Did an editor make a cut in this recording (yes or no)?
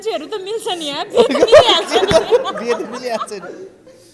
no